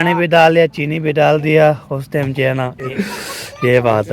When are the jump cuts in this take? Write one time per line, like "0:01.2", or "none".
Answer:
0:02.9